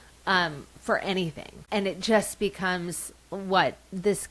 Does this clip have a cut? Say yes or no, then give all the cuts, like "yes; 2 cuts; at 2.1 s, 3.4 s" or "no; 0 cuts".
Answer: yes; 1 cut; at 1.5 s